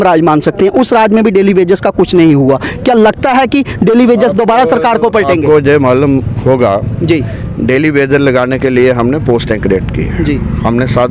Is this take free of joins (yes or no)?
yes